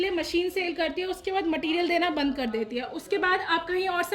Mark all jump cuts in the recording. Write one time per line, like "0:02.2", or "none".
none